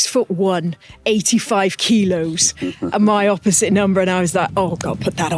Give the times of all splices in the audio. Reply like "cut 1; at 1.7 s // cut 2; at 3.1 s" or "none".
none